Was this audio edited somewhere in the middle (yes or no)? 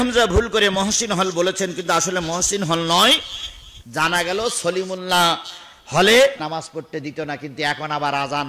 no